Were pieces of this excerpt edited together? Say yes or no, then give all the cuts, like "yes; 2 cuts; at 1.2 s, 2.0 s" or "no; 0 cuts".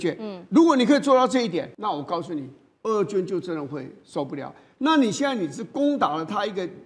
yes; 1 cut; at 1.7 s